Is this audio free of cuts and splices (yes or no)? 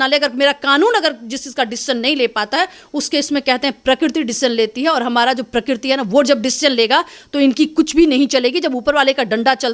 yes